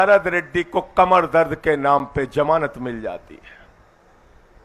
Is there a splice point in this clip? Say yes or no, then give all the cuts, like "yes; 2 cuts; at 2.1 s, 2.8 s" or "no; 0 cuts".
no; 0 cuts